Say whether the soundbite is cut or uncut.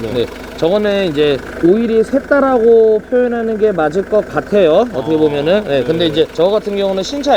uncut